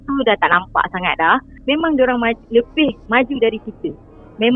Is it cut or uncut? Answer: cut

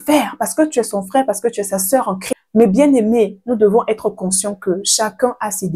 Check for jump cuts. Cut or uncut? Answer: cut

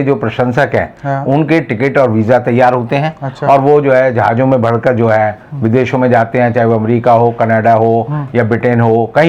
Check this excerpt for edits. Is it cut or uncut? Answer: uncut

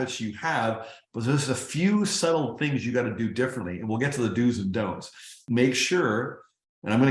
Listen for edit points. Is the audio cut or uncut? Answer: cut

